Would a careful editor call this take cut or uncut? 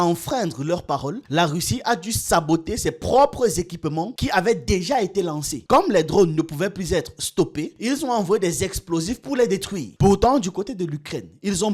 uncut